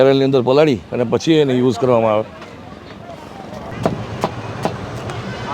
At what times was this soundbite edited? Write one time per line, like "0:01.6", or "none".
0:03.7